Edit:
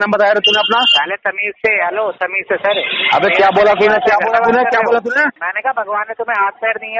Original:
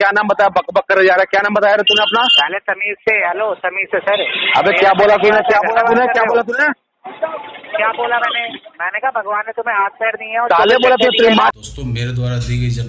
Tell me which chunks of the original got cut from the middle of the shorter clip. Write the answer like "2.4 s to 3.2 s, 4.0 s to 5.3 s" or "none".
6.9 s to 8.8 s

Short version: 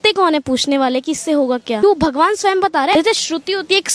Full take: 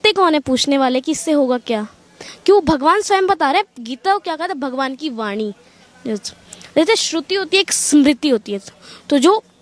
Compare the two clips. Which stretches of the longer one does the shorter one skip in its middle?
1.8 s to 2.5 s, 3.6 s to 6.8 s

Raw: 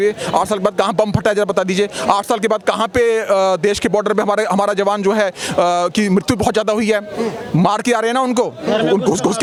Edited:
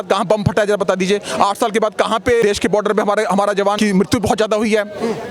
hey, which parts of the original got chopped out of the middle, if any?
3.1 s to 3.6 s, 5.0 s to 5.9 s

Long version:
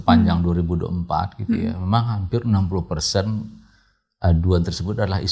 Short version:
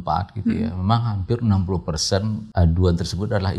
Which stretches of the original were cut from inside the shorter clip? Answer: 3.5 s to 4.1 s

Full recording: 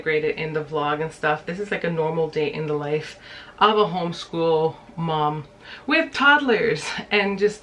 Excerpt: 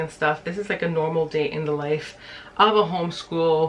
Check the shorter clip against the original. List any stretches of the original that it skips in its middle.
none

